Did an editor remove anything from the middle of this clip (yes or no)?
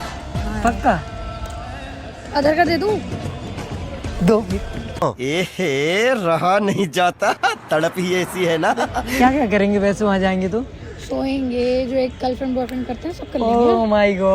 yes